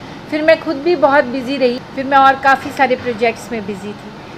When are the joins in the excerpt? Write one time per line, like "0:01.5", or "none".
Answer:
0:01.9

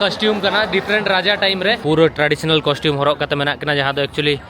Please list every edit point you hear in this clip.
0:01.8

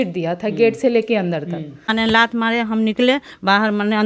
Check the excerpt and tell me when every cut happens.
0:01.9

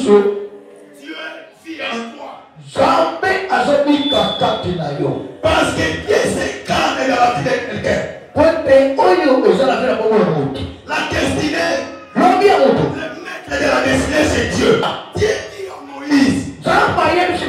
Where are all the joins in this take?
0:14.8

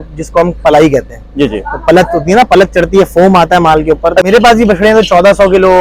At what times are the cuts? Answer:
0:04.3

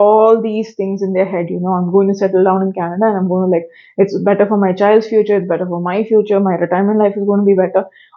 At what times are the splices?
none

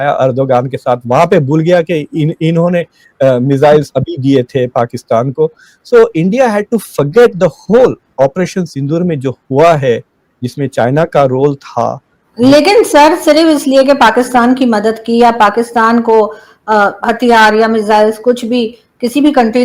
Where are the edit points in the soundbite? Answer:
none

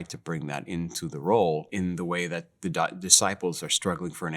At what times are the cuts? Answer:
0:01.7

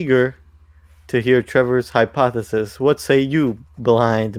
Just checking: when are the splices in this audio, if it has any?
none

